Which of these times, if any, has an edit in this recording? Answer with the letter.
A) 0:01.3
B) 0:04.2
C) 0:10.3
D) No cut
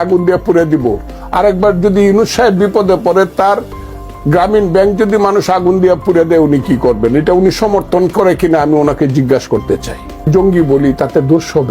C